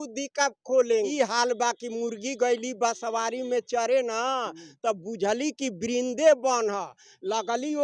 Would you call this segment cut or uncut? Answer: cut